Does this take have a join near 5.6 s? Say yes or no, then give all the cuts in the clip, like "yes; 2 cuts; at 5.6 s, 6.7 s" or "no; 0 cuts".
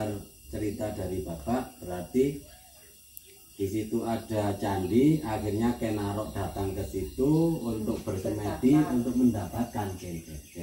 no; 0 cuts